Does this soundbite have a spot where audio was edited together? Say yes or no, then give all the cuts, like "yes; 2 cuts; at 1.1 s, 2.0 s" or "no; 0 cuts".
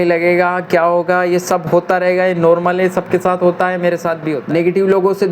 yes; 1 cut; at 4.3 s